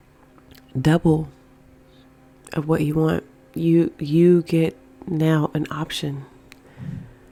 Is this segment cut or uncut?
uncut